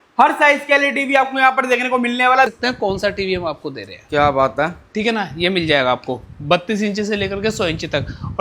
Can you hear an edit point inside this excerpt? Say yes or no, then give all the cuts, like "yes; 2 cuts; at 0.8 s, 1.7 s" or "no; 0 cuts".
yes; 1 cut; at 2.5 s